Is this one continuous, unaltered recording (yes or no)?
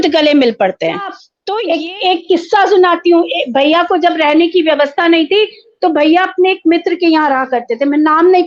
no